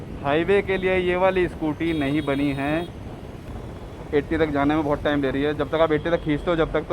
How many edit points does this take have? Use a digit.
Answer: 1